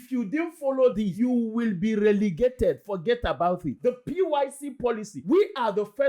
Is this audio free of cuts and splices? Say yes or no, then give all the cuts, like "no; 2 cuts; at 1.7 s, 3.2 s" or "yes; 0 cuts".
no; 2 cuts; at 1.0 s, 3.8 s